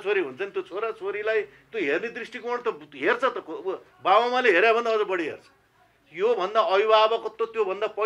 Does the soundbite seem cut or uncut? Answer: uncut